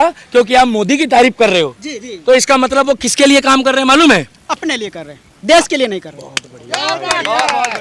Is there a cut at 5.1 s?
no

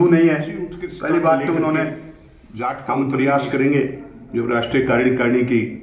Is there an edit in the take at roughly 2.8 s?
yes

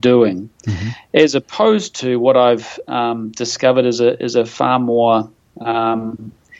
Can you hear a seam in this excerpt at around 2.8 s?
no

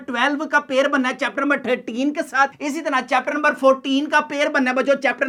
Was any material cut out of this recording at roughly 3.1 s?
no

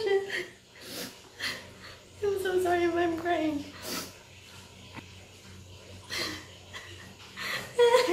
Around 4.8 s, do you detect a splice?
yes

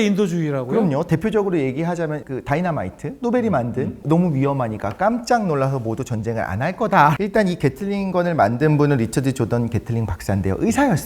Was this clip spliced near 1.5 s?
no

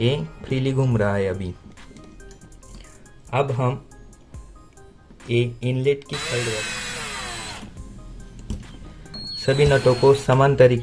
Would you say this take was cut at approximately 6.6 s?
yes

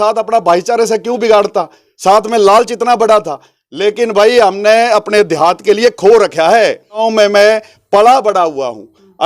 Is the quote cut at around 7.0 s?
yes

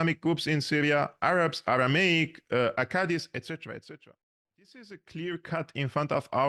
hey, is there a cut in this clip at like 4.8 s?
yes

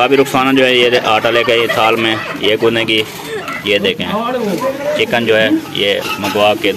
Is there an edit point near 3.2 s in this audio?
no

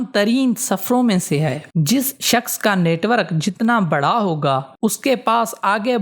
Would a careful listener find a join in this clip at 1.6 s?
yes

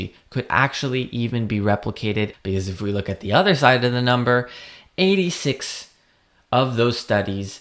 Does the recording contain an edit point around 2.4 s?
yes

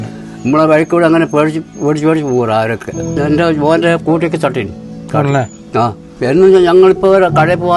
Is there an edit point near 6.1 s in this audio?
yes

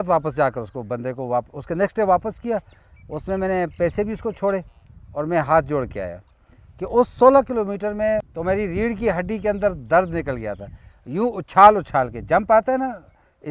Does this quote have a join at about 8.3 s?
yes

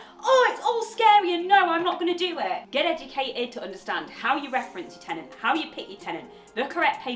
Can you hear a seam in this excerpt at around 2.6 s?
yes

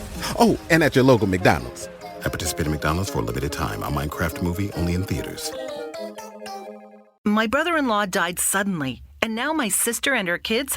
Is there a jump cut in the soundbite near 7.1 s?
yes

